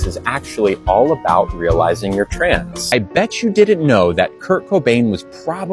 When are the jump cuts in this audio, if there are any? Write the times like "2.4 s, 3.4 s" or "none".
2.8 s